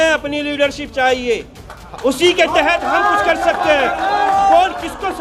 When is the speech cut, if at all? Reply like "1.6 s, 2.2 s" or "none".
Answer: none